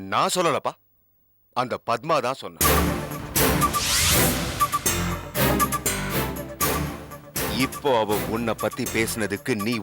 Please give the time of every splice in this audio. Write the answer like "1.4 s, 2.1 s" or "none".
none

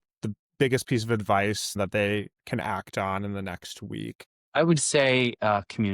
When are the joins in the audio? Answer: 1.8 s, 4.3 s

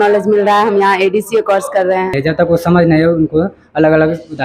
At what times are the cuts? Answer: 2.1 s

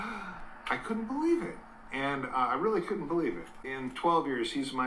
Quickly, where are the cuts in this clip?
3.6 s

